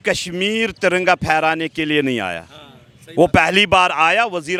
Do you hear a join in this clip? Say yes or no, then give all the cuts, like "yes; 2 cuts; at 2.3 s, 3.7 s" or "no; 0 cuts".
no; 0 cuts